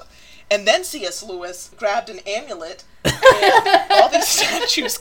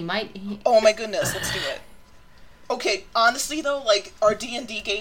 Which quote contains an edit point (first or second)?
first